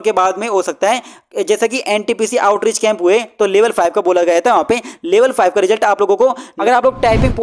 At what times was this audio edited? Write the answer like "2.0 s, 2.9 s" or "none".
6.5 s